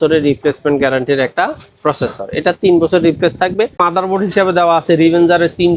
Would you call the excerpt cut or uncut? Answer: cut